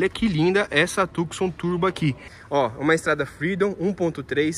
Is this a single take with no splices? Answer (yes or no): no